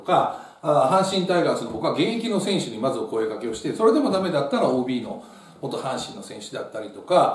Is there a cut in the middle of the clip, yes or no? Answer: no